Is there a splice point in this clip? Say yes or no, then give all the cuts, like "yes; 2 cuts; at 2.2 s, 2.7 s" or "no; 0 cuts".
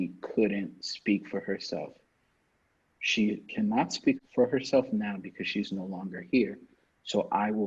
yes; 1 cut; at 4.2 s